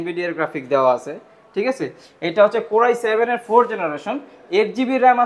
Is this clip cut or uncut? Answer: uncut